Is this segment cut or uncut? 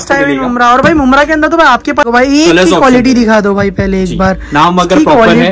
cut